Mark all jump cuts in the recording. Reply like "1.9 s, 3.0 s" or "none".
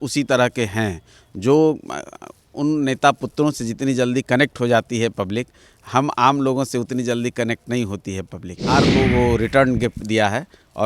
8.9 s